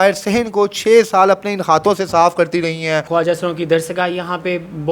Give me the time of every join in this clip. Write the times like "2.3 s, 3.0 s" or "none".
3.1 s